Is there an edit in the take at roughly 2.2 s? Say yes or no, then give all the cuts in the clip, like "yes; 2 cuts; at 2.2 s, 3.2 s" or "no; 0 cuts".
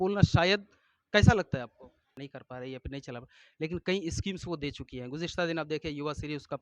yes; 1 cut; at 2.2 s